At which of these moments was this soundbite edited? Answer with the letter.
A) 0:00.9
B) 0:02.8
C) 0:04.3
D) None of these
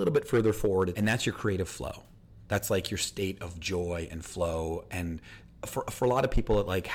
A